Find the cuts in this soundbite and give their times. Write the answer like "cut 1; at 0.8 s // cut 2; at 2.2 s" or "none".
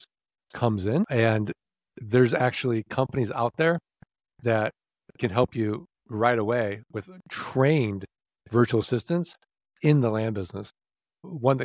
cut 1; at 1.1 s

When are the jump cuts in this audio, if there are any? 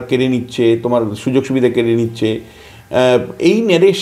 none

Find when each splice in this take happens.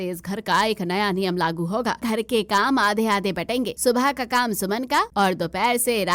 cut 1; at 2.0 s // cut 2; at 3.7 s // cut 3; at 5.1 s

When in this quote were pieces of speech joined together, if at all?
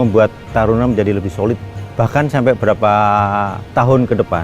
cut 1; at 1.8 s

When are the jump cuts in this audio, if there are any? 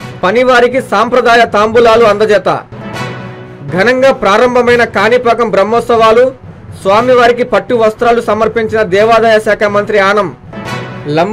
none

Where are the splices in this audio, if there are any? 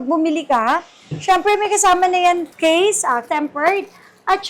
cut 1; at 2.5 s // cut 2; at 3.2 s

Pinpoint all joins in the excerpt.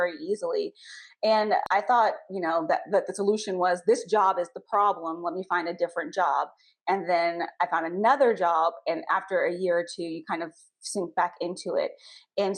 cut 1; at 1.6 s

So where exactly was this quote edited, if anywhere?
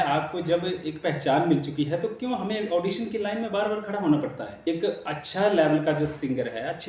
cut 1; at 4.6 s

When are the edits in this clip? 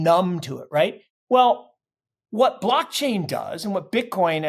cut 1; at 1.0 s

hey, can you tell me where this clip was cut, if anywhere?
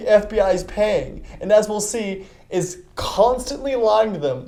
none

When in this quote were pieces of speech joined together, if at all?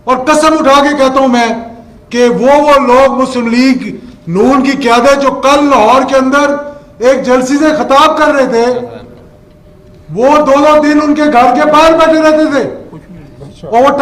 none

